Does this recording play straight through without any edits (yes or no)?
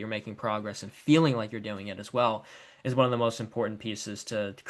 yes